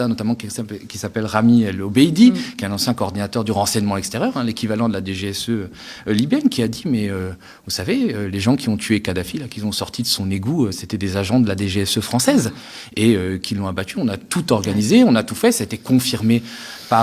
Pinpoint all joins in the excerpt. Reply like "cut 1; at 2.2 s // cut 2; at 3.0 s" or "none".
none